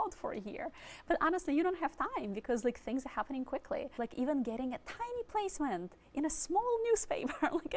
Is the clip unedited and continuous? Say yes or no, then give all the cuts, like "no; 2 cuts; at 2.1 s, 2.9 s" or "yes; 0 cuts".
no; 1 cut; at 4.0 s